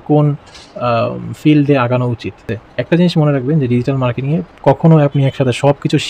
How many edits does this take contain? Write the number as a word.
one